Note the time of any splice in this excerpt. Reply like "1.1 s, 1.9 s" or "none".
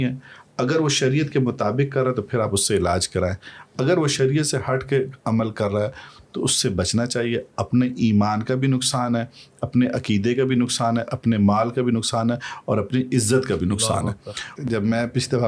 14.6 s